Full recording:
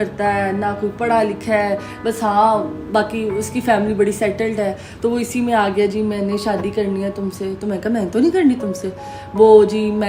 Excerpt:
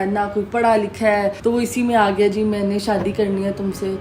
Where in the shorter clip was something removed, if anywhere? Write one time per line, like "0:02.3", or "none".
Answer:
0:01.3